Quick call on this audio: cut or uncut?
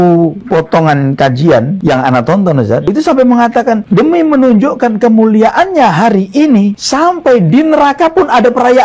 uncut